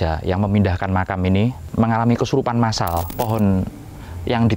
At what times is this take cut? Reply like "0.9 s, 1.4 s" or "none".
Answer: 1.6 s, 3.1 s